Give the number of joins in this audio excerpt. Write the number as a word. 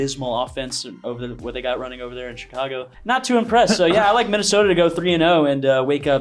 one